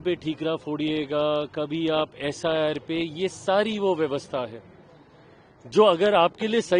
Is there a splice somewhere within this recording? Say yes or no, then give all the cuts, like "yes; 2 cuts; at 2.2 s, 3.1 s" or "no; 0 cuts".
no; 0 cuts